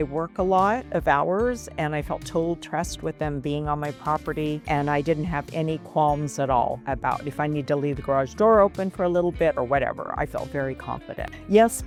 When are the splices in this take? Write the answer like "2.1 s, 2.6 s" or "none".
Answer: none